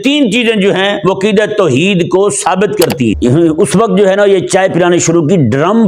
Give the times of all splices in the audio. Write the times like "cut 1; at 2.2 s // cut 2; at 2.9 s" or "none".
cut 1; at 3.1 s